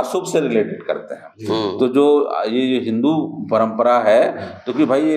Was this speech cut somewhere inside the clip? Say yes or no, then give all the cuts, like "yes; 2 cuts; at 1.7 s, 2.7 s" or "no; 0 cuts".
no; 0 cuts